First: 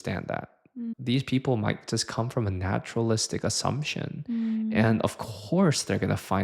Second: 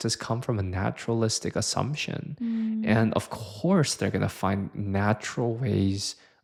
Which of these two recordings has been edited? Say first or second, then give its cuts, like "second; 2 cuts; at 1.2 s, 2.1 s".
first; 1 cut; at 0.9 s